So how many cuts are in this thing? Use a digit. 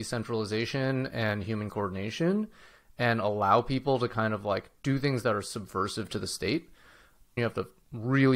1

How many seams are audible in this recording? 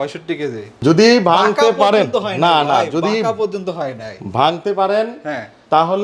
0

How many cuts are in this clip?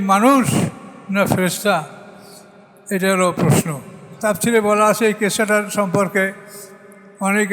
1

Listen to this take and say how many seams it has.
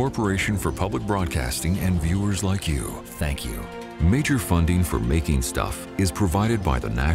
1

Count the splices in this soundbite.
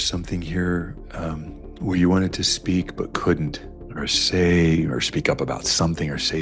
0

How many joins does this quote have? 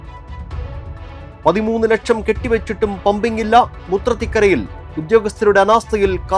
1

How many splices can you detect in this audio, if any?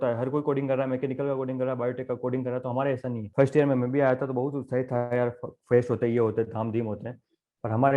1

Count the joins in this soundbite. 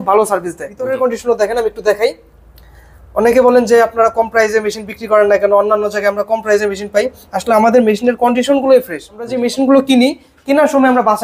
2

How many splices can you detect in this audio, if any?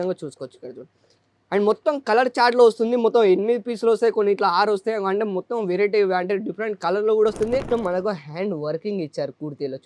1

